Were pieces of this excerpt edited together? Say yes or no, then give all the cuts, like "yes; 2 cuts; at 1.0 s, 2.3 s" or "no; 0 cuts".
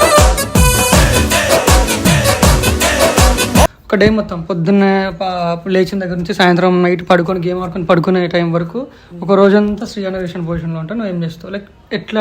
yes; 1 cut; at 3.8 s